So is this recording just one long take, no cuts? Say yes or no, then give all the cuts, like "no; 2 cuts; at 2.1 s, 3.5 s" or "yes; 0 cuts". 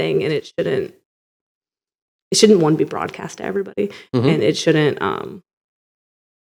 yes; 0 cuts